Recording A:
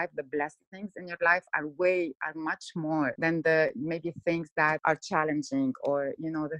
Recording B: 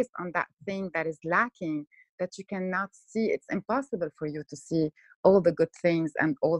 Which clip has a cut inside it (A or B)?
A